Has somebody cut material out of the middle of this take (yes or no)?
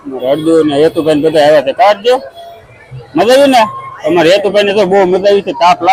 no